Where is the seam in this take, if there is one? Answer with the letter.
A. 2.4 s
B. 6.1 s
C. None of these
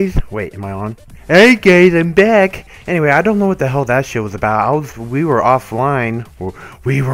A